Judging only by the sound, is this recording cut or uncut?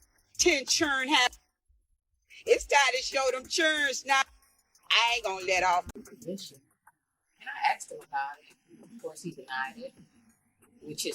cut